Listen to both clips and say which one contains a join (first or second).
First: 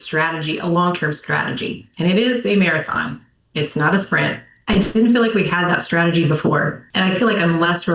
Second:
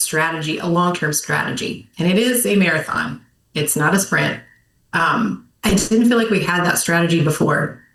first